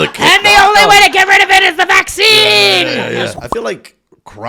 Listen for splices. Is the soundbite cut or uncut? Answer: cut